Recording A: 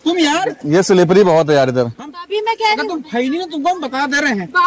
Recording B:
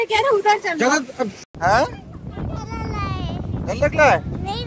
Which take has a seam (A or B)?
B